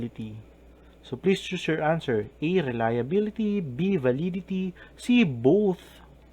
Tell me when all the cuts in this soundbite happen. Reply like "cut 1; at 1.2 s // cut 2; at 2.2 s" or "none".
cut 1; at 4.2 s